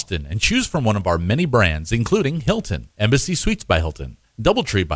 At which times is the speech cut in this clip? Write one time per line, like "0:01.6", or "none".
0:02.4